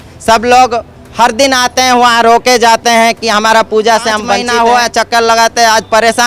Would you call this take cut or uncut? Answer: cut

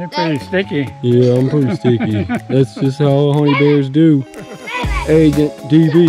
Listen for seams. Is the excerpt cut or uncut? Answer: uncut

